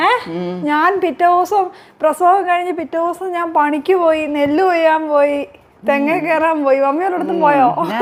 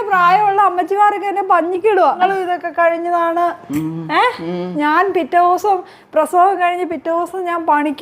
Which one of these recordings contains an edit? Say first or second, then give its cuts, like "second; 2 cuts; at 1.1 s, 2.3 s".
second; 1 cut; at 2.2 s